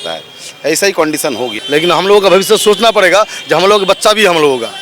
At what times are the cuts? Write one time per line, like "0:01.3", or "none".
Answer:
0:01.5